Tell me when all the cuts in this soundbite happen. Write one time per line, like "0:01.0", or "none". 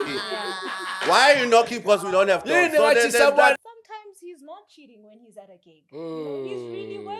0:03.6